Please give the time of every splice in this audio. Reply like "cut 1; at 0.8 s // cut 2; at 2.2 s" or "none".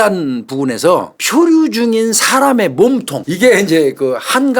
cut 1; at 1.2 s // cut 2; at 3.2 s